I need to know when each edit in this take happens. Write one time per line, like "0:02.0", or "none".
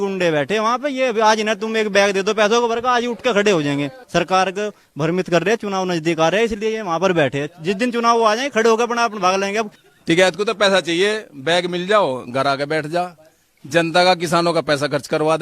0:04.0
0:09.8